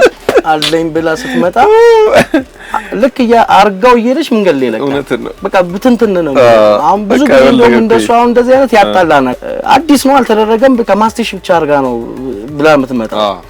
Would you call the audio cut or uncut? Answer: uncut